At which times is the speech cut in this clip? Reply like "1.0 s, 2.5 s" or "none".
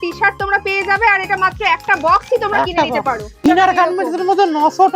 3.4 s